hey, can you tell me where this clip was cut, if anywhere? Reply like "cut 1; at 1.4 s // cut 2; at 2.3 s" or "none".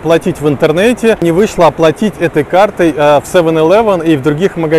cut 1; at 1.2 s